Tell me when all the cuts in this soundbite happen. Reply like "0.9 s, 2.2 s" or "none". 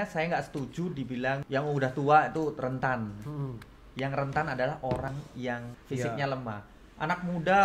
1.4 s, 5.4 s

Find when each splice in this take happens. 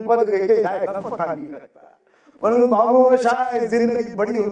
none

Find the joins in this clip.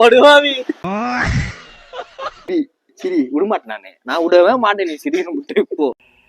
2.5 s

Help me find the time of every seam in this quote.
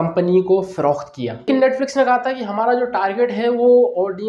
1.5 s

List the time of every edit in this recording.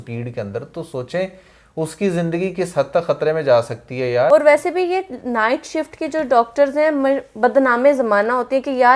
4.3 s

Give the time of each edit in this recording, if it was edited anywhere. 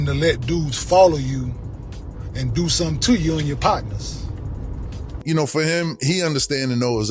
5.2 s

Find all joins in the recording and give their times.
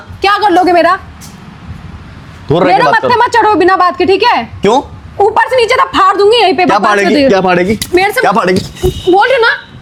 none

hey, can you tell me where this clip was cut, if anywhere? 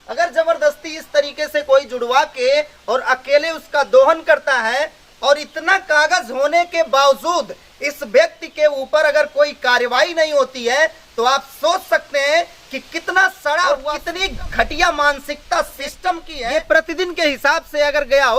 14.0 s, 16.3 s

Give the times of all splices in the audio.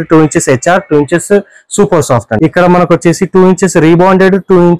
2.3 s

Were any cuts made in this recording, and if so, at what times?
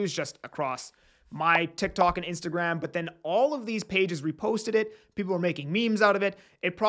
none

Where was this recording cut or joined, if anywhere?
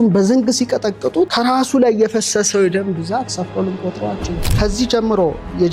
1.3 s, 3.3 s, 4.4 s

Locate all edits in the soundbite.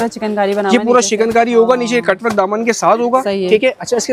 none

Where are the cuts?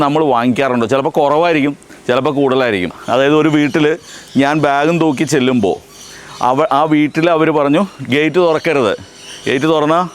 3.0 s

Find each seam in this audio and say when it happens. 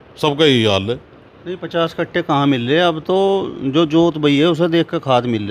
none

